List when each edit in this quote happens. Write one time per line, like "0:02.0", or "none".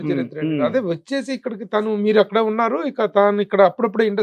none